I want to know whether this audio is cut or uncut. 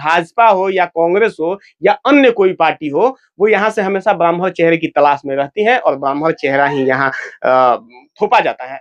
uncut